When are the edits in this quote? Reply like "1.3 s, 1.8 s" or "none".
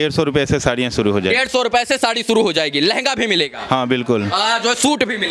none